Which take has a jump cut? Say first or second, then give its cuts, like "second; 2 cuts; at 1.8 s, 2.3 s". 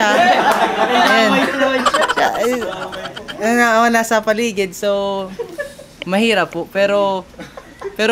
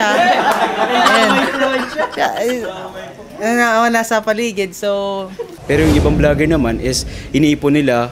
second; 1 cut; at 5.6 s